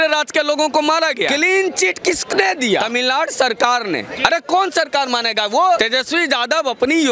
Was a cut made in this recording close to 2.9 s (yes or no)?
yes